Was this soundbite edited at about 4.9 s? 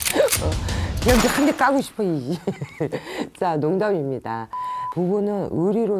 yes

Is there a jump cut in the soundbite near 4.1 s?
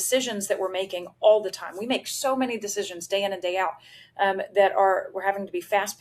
no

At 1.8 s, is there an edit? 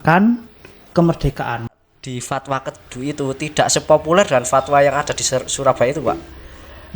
yes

